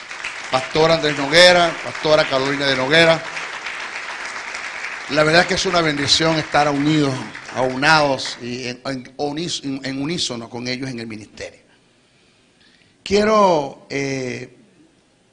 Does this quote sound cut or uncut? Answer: uncut